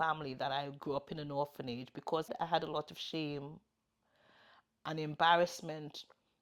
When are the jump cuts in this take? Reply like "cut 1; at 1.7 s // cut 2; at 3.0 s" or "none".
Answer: cut 1; at 2.3 s